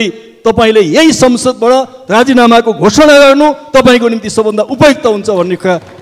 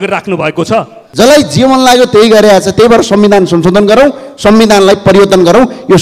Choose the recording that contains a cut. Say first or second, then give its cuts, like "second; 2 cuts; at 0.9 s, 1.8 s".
second; 1 cut; at 1.0 s